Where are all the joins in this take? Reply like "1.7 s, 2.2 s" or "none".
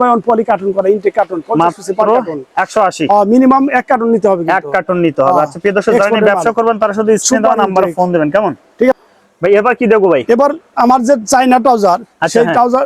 none